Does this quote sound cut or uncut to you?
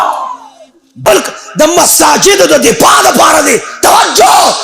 cut